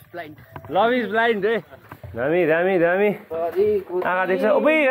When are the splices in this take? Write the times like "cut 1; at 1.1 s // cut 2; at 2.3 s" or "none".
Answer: cut 1; at 2.3 s